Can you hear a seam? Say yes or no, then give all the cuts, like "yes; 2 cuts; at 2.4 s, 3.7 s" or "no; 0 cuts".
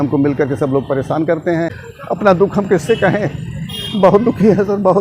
yes; 1 cut; at 2.2 s